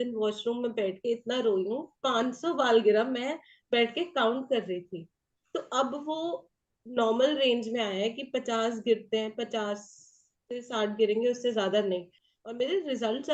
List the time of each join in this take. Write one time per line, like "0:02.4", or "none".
0:12.1